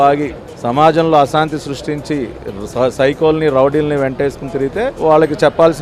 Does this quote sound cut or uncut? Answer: uncut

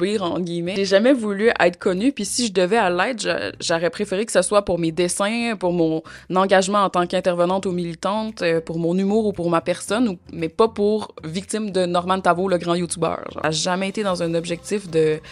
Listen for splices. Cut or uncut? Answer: cut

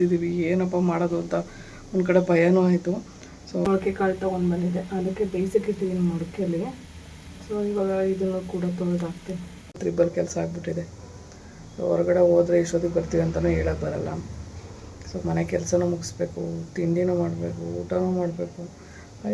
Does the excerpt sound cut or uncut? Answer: cut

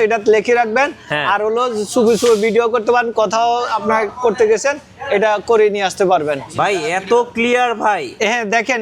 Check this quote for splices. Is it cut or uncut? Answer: cut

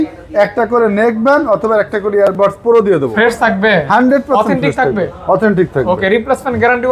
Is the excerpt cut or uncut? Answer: cut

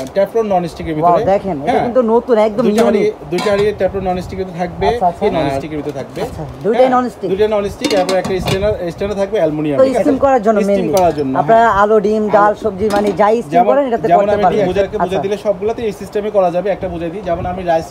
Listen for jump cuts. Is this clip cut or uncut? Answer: cut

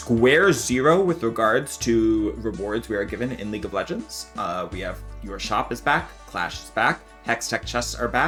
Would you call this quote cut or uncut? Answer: uncut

